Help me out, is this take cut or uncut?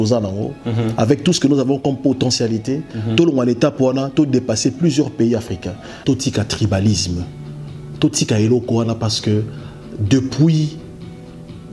cut